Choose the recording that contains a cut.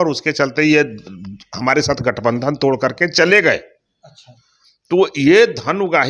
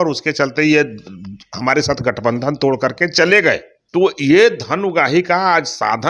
second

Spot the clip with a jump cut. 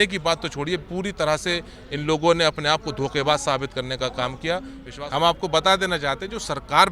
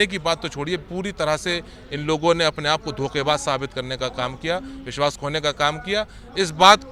first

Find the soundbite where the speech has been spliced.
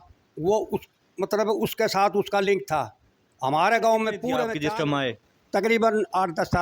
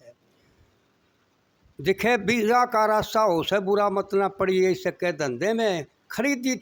first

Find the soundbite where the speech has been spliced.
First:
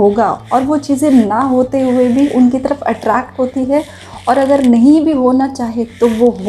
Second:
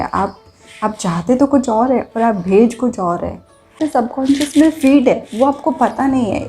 second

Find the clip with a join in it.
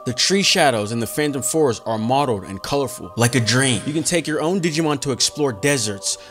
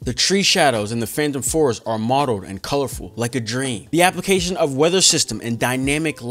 first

